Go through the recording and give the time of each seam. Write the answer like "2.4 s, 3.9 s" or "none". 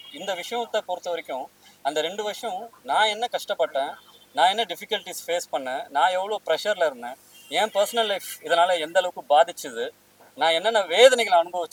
none

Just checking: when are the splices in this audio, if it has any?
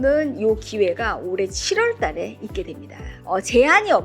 3.1 s

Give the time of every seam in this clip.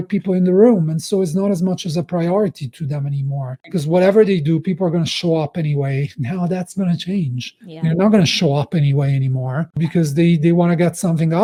none

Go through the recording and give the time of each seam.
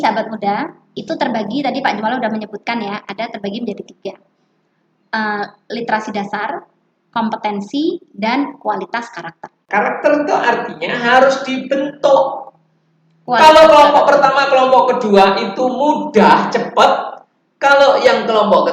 9.6 s

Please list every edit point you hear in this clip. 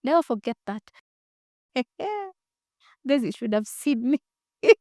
1.1 s

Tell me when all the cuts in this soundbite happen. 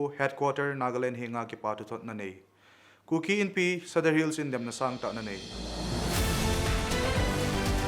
5.5 s

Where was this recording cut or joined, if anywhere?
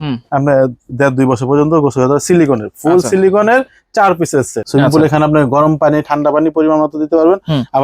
4.6 s

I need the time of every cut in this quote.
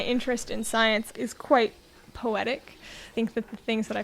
1.1 s, 3.1 s

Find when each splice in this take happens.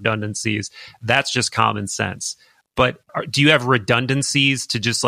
3.1 s

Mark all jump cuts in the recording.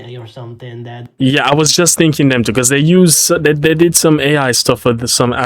1.1 s

